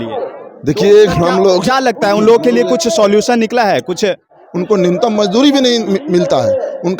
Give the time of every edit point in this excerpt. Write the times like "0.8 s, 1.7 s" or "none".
4.3 s